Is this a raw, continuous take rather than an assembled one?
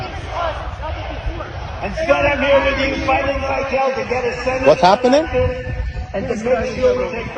yes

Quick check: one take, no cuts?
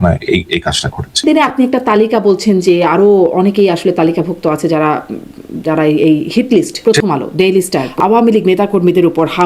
no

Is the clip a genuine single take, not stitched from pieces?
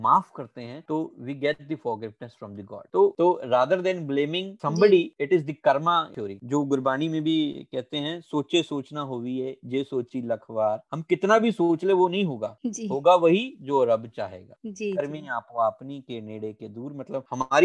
yes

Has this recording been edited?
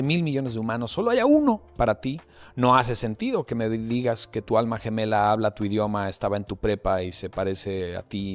no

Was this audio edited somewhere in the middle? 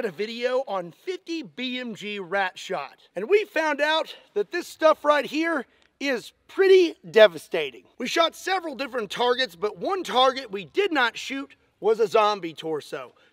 no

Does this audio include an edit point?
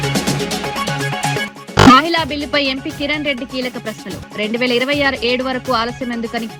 no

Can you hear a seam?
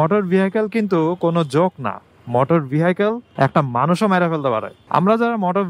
yes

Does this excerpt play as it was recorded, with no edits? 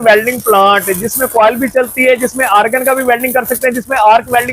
yes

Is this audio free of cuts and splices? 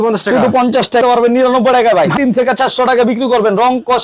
no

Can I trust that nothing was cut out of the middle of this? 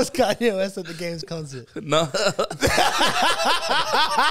yes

